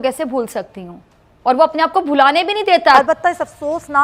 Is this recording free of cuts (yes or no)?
no